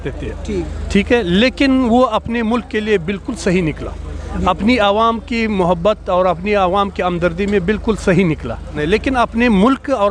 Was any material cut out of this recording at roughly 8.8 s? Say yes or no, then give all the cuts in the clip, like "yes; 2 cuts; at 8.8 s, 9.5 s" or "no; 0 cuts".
yes; 1 cut; at 8.8 s